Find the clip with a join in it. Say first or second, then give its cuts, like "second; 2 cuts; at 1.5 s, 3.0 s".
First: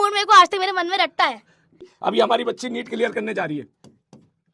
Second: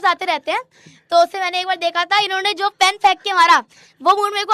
first; 1 cut; at 1.9 s